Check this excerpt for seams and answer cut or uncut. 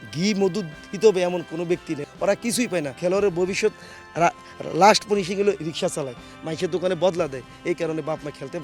cut